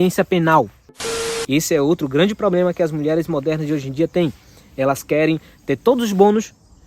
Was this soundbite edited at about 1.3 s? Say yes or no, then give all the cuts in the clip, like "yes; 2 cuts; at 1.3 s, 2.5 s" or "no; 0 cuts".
yes; 1 cut; at 1.3 s